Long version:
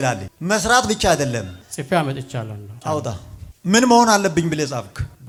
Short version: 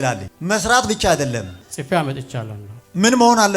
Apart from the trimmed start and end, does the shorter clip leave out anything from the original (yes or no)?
yes